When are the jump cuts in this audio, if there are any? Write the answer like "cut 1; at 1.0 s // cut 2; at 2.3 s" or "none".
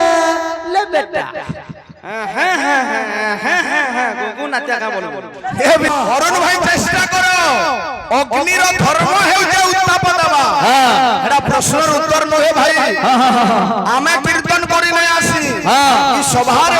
cut 1; at 5.9 s